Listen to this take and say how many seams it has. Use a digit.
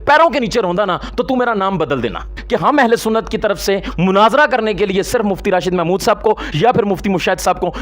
1